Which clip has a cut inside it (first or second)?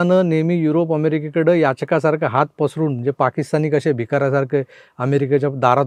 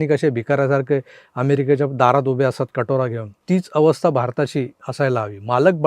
second